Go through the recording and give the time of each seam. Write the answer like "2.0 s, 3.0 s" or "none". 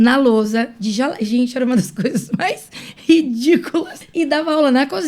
4.0 s